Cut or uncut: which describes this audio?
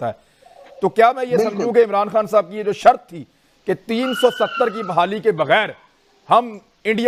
uncut